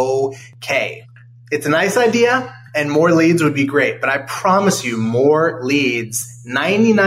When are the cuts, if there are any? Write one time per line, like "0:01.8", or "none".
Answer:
none